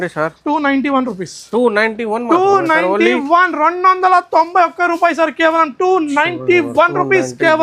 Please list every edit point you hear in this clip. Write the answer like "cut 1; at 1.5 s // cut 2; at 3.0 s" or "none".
none